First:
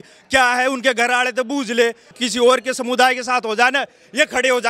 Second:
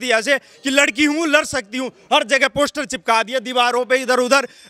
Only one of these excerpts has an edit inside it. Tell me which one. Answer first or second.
first